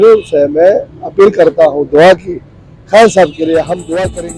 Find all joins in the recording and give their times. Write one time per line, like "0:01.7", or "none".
none